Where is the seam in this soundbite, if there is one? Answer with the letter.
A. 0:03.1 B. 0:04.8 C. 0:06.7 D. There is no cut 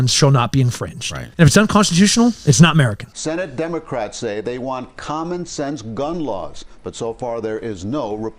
A